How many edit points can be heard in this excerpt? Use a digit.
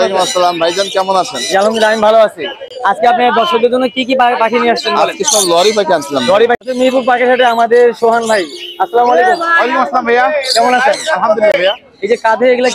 1